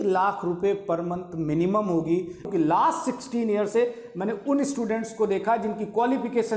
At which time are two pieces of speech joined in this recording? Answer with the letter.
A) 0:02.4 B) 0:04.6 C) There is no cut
A